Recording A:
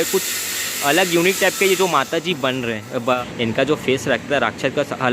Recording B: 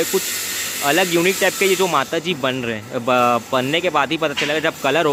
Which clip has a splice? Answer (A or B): A